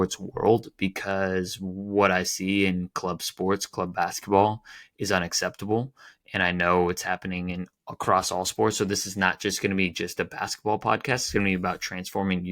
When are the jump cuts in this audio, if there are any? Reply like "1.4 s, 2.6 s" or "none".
none